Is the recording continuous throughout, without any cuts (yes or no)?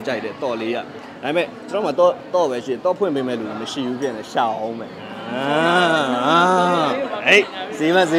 yes